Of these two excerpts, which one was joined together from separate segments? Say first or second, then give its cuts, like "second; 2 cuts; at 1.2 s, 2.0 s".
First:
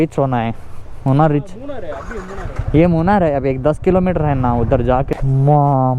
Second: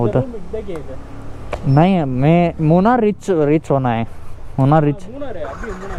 first; 1 cut; at 5.1 s